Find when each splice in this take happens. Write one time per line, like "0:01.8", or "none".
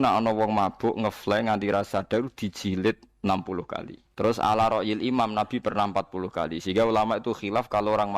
0:04.0